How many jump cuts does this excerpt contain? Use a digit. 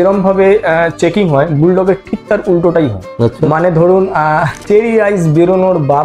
1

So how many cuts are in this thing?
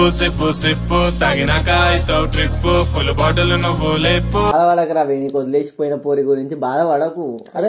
1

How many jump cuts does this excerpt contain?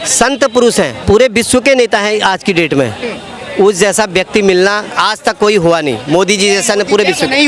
2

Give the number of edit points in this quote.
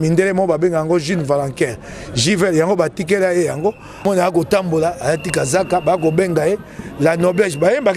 1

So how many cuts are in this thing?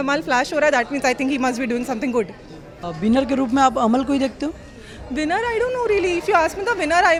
0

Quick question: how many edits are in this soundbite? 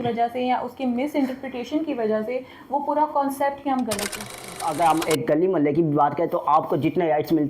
1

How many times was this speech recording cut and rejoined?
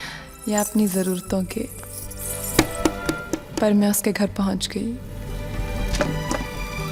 0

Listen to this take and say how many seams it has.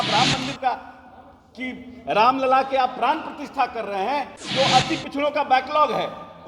1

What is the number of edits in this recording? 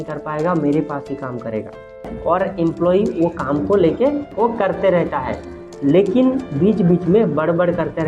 1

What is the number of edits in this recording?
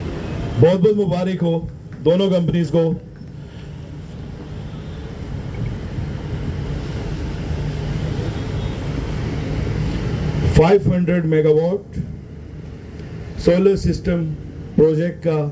0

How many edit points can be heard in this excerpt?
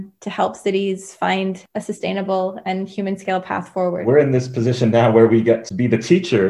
3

